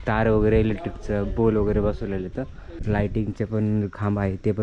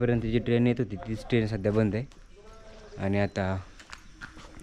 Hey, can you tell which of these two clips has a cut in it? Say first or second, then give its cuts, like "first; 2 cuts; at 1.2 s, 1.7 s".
first; 1 cut; at 2.8 s